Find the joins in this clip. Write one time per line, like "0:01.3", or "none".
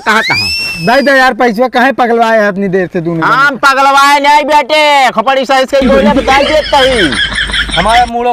none